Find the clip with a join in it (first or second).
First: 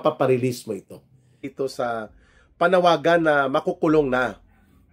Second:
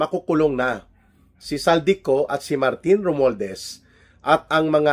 first